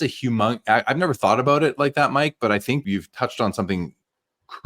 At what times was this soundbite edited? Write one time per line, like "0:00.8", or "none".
0:02.8